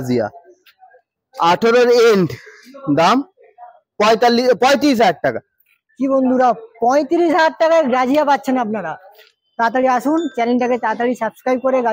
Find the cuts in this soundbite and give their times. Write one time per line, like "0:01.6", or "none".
none